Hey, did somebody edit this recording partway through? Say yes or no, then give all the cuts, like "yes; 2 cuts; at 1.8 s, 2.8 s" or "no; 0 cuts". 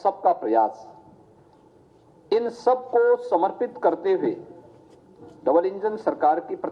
yes; 1 cut; at 3.5 s